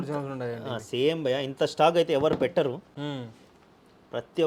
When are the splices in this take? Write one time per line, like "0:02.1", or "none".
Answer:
none

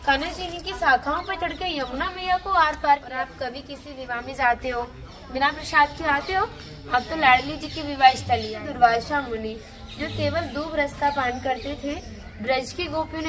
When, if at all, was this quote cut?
0:03.1
0:08.6

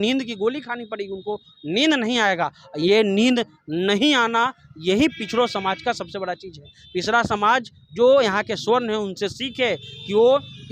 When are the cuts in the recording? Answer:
none

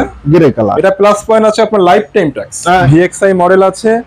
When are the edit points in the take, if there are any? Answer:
0:02.8

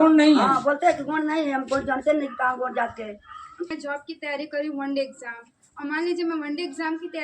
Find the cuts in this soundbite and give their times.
0:03.7

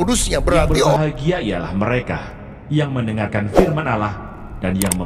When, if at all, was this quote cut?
0:01.0

